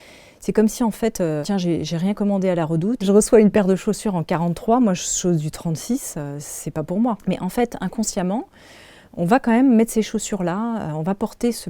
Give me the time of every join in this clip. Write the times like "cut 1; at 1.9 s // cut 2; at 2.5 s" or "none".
cut 1; at 1.4 s // cut 2; at 3.0 s // cut 3; at 7.2 s